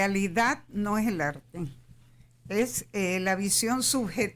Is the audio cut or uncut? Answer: uncut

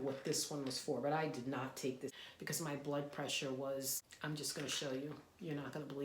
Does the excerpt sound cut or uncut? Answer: cut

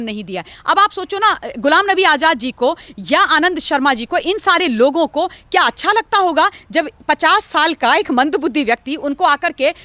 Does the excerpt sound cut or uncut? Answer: uncut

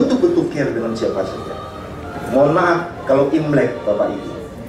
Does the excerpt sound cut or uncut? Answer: cut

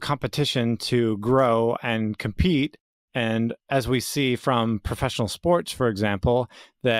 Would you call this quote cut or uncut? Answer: uncut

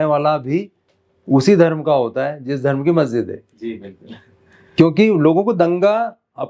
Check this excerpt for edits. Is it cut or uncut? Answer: uncut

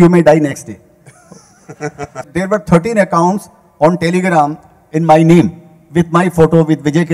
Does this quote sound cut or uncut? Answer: cut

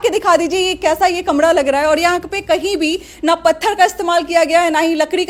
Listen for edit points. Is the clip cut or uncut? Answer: uncut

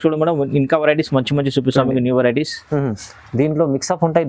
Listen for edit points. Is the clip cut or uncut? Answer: uncut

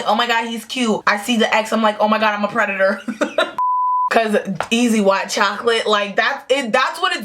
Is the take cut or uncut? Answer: cut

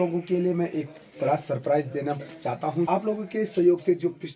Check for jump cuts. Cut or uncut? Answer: cut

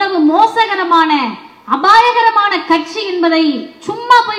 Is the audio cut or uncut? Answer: uncut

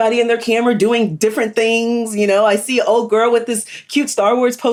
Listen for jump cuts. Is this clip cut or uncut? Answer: uncut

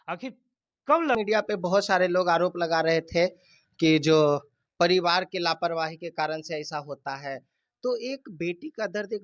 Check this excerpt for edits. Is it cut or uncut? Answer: cut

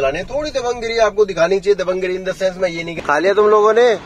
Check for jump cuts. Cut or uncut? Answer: cut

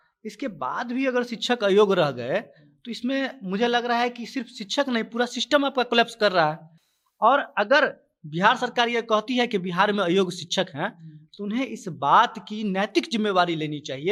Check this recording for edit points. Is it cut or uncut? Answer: uncut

